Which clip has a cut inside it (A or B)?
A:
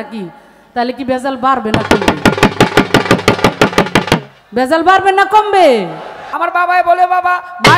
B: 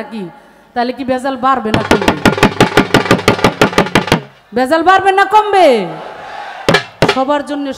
A